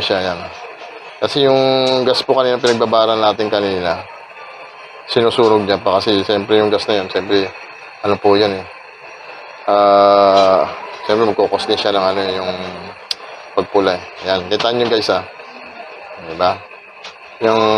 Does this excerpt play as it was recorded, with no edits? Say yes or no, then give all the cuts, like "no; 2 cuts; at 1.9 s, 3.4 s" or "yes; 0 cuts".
yes; 0 cuts